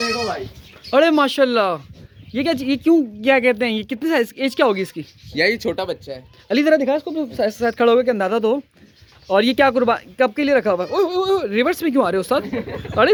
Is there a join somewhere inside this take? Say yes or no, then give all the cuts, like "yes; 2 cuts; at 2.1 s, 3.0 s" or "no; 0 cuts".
no; 0 cuts